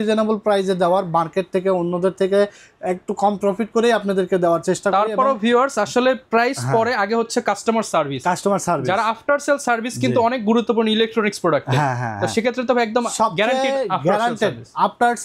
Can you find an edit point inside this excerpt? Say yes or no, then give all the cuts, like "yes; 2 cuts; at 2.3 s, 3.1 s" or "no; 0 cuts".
no; 0 cuts